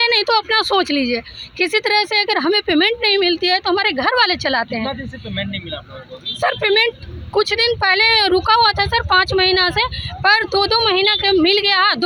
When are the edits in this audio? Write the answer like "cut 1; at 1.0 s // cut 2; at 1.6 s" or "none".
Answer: none